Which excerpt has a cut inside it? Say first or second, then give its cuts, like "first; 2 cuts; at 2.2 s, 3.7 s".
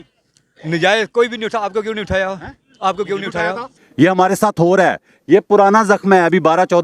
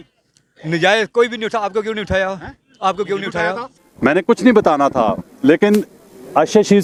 first; 1 cut; at 3.8 s